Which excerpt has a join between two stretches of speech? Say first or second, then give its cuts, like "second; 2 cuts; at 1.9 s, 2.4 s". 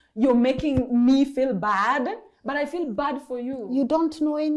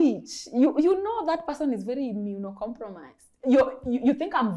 second; 1 cut; at 3.3 s